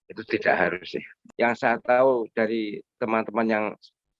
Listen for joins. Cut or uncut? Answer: cut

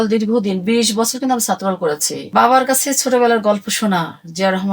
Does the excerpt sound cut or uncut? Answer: cut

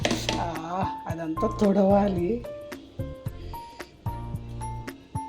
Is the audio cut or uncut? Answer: cut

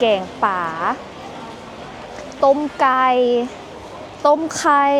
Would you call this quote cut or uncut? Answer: uncut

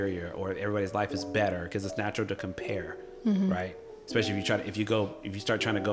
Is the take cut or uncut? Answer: uncut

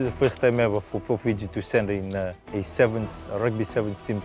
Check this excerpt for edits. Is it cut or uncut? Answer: cut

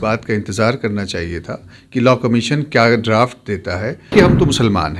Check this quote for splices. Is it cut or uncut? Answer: cut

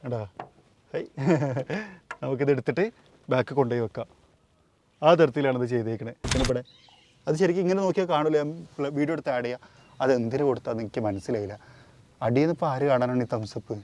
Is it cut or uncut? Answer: cut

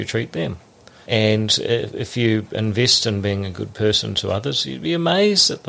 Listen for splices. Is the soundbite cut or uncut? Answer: cut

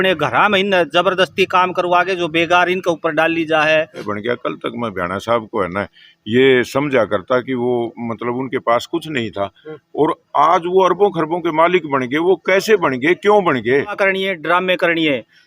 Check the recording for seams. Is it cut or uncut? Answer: cut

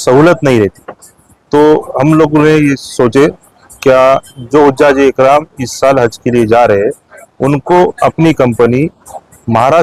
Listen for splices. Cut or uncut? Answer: uncut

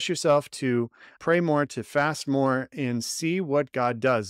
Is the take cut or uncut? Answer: uncut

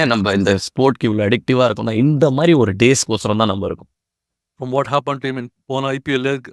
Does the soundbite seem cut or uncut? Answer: cut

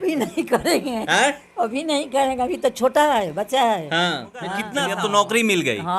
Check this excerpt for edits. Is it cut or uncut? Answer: cut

